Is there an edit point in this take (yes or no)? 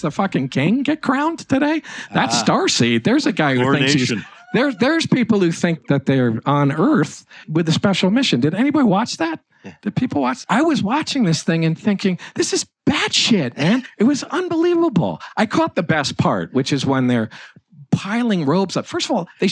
yes